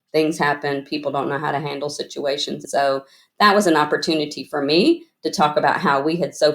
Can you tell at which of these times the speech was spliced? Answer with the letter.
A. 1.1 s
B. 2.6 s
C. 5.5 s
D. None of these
B